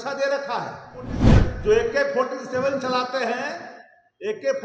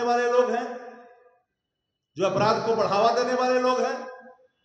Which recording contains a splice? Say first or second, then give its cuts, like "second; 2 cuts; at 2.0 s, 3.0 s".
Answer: first; 1 cut; at 1.3 s